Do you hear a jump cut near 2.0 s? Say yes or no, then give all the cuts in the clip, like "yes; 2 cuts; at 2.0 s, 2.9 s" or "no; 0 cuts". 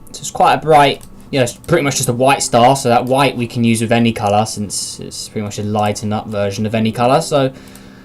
yes; 1 cut; at 2.0 s